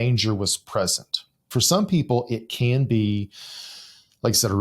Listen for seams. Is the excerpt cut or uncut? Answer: cut